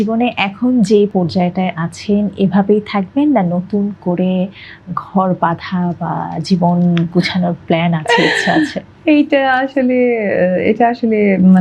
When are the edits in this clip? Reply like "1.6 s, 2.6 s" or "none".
1.1 s